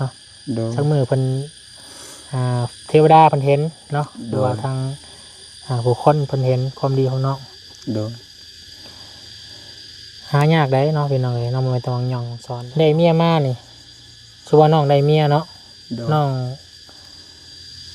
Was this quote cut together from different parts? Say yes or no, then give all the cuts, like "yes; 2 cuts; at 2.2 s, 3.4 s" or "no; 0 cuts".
yes; 1 cut; at 12.4 s